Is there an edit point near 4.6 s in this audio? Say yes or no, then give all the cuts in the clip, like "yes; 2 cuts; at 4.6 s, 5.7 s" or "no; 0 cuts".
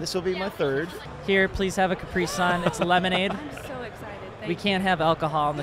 no; 1 cut; at 1.0 s